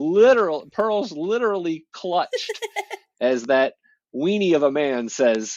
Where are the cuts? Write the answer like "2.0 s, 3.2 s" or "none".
none